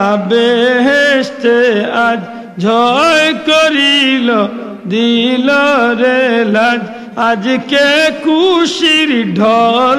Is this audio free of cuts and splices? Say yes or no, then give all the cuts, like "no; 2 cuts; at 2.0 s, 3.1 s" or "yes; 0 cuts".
yes; 0 cuts